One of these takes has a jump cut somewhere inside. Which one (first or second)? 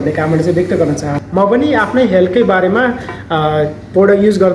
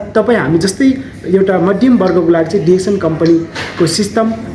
first